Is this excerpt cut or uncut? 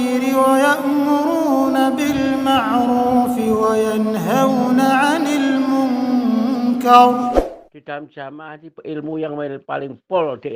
cut